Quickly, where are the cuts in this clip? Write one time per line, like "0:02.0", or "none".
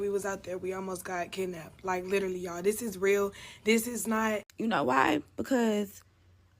0:04.5